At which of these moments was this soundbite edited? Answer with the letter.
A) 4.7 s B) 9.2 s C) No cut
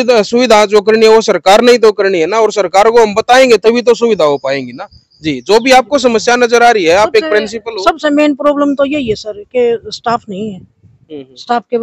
C